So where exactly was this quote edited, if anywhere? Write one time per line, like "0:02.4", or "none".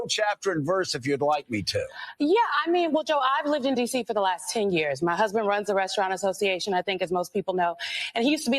none